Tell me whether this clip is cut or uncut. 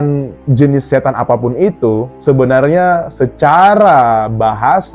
uncut